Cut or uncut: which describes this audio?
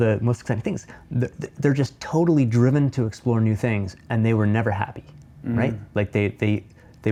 uncut